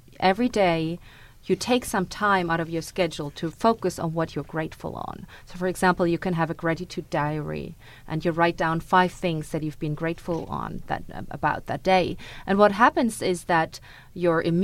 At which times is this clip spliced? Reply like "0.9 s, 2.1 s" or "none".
none